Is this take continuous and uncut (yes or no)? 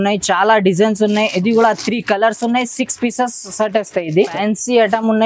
no